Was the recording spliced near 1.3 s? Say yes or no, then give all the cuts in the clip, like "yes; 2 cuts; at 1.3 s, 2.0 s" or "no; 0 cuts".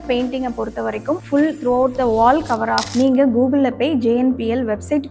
no; 1 cut; at 2.9 s